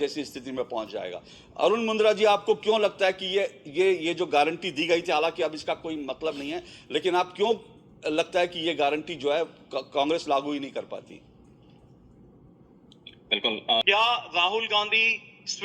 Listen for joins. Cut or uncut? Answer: cut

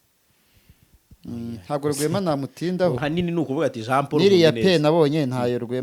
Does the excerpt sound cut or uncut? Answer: cut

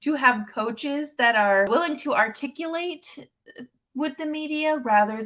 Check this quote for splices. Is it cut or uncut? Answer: cut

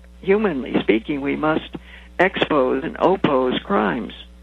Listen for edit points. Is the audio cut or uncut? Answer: uncut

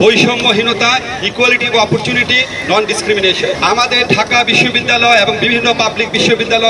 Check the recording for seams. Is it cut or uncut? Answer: cut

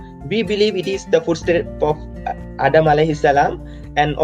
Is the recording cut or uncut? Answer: uncut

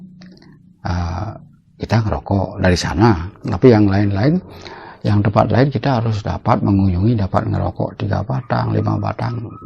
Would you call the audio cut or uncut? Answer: uncut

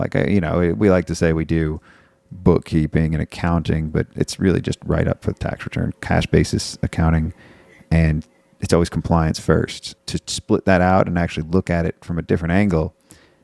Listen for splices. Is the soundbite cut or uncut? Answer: uncut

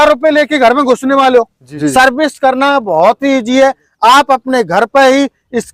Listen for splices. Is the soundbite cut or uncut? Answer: cut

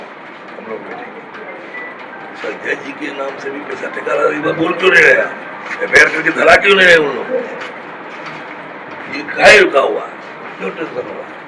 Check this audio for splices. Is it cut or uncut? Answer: uncut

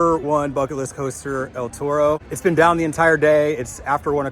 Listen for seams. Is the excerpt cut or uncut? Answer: cut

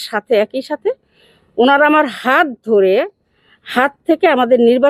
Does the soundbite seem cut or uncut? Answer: uncut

